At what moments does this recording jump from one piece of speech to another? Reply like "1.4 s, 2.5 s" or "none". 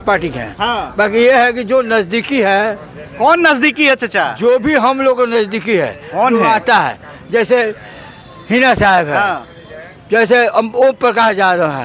none

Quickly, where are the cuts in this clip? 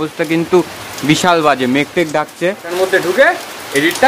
2.7 s

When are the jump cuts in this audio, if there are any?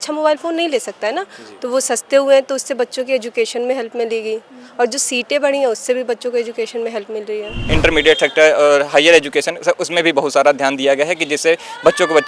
7.6 s

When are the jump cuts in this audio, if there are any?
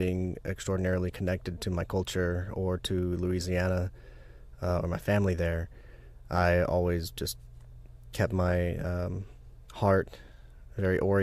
none

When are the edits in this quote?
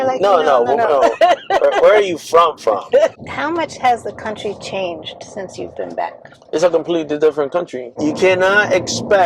3.2 s, 7.8 s

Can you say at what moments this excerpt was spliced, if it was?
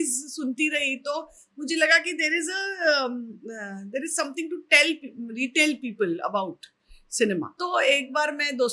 7.5 s

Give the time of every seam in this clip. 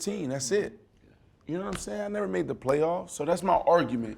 none

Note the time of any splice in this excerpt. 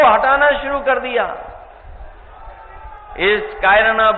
3.1 s

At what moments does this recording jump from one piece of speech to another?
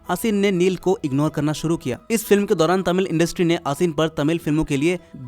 2.0 s

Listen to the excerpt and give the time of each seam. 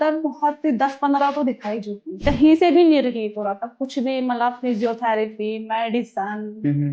2.2 s

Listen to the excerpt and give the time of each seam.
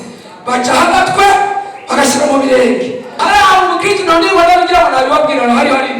3.2 s

